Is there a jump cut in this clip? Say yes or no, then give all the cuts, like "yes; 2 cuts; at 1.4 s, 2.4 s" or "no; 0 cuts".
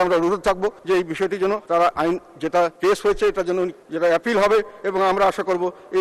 yes; 4 cuts; at 0.8 s, 1.6 s, 2.7 s, 3.8 s